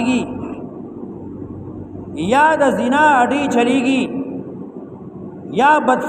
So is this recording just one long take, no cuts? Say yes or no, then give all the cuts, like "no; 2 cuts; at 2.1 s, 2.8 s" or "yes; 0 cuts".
yes; 0 cuts